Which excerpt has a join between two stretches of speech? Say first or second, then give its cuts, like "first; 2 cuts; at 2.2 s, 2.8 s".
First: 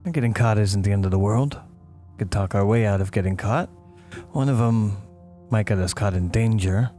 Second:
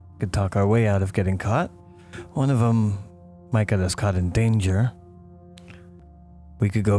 second; 1 cut; at 6.0 s